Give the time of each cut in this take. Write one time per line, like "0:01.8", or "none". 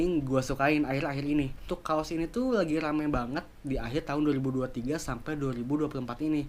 0:01.7